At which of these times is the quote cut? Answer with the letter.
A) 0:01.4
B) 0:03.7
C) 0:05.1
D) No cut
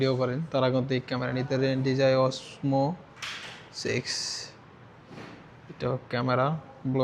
D